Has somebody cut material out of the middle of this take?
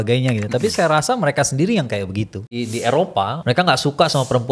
yes; 2 cuts; at 2.5 s, 3.4 s

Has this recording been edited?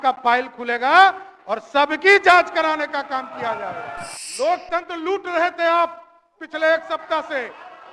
yes; 1 cut; at 4.2 s

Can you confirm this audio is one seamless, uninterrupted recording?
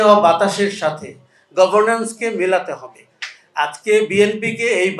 yes; 0 cuts

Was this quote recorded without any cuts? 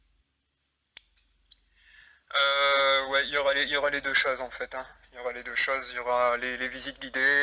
no; 1 cut; at 4.9 s

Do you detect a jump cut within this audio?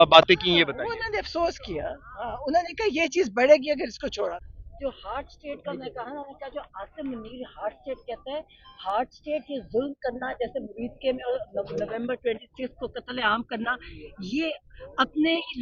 yes; 1 cut; at 4.4 s

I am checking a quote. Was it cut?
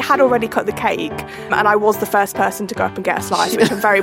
yes; 1 cut; at 1.5 s

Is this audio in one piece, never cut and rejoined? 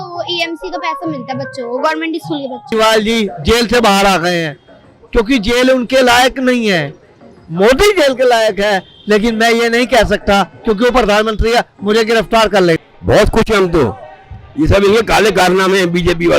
no; 2 cuts; at 2.7 s, 12.8 s

